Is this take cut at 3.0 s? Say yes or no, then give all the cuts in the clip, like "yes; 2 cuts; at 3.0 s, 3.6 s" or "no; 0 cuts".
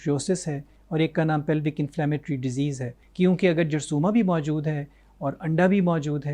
yes; 1 cut; at 3.0 s